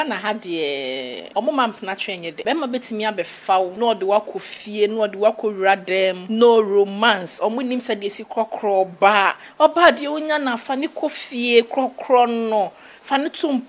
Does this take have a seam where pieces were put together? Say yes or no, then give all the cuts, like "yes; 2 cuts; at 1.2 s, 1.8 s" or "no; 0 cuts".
yes; 4 cuts; at 1.2 s, 2.4 s, 3.7 s, 6.2 s